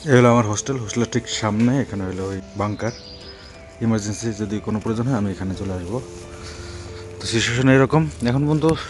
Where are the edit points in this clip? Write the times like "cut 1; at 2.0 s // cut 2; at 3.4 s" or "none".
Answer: cut 1; at 2.5 s